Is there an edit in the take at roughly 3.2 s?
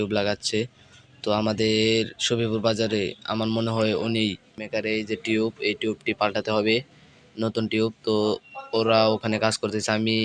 no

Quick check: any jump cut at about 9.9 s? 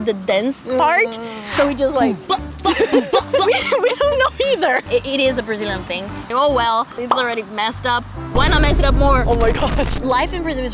yes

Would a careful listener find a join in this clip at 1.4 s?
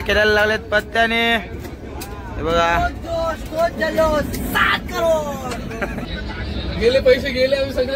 no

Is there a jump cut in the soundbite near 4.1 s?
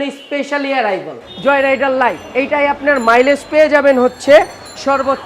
no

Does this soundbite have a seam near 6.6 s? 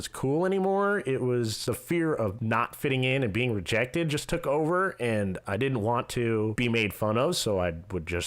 yes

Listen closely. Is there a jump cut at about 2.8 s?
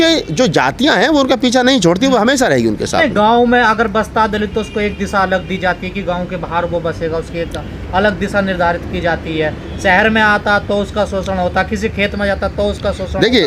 no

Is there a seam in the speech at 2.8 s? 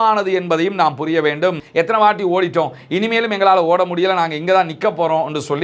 no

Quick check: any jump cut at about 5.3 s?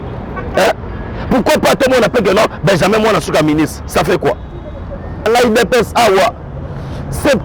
yes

